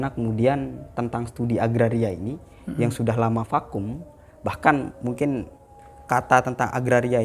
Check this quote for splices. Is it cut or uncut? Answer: uncut